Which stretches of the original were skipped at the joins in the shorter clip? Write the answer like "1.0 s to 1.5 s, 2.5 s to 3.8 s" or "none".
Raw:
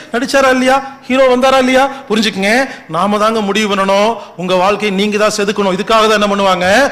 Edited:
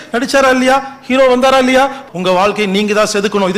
2.0 s to 4.2 s